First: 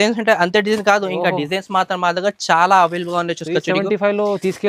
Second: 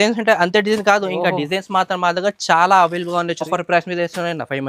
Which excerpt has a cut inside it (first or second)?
second